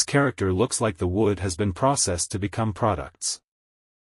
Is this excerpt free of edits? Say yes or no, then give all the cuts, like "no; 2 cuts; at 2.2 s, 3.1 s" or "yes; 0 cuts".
no; 1 cut; at 1.2 s